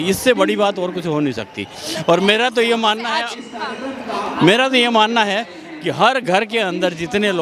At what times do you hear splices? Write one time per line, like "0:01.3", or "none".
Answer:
none